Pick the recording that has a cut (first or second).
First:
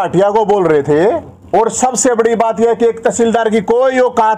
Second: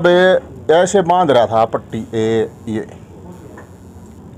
first